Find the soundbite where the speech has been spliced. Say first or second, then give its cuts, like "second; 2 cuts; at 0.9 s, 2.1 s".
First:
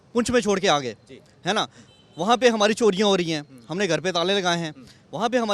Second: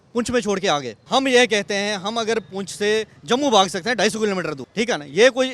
second; 2 cuts; at 0.9 s, 4.6 s